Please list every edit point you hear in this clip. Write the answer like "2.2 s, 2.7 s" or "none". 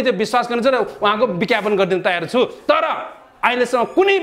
none